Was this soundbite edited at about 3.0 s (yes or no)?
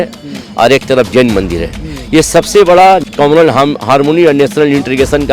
yes